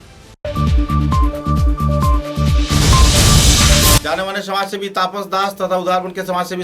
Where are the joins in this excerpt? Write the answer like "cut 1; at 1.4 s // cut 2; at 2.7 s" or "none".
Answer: cut 1; at 4.0 s